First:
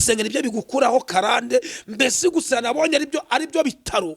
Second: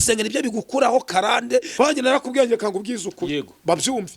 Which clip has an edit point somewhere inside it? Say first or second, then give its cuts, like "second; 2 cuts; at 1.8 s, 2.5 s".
second; 1 cut; at 1.7 s